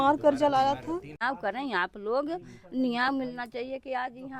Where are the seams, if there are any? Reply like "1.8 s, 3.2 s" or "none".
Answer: 1.2 s